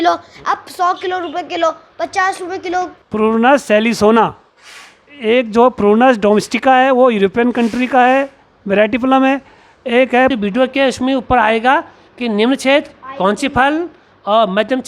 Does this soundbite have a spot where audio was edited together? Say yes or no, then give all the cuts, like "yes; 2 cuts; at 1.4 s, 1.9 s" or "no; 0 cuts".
yes; 2 cuts; at 3.0 s, 10.3 s